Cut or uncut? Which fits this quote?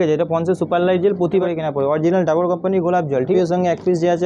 cut